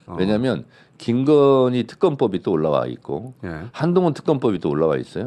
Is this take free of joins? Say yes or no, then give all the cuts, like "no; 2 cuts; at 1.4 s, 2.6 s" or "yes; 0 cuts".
yes; 0 cuts